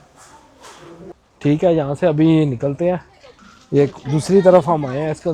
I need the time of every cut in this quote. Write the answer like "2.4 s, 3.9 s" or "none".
none